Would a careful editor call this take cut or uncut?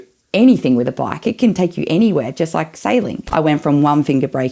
cut